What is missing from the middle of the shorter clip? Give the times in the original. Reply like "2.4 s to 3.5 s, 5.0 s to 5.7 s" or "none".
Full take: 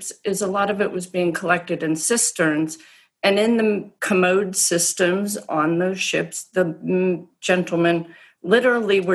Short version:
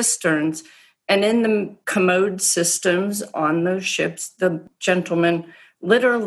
6.8 s to 7.3 s